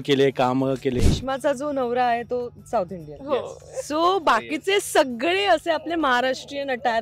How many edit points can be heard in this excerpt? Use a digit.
1